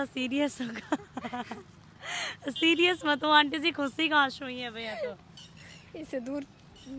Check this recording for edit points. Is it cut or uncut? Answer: uncut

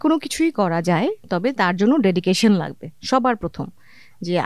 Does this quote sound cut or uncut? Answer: uncut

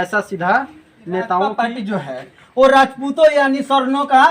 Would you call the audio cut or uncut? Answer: cut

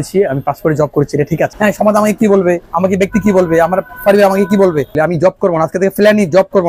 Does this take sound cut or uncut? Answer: cut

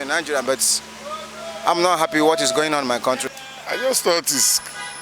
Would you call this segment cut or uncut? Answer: cut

